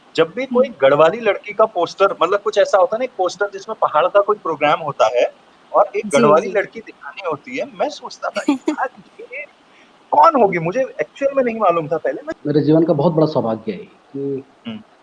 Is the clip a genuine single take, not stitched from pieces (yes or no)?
no